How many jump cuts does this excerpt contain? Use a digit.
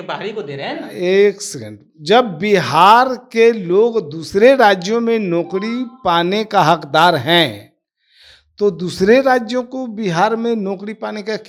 0